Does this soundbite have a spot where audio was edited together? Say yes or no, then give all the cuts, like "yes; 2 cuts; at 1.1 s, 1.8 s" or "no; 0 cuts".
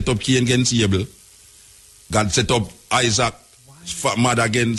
no; 0 cuts